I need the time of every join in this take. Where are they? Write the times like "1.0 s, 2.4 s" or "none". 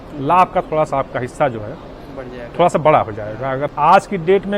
3.6 s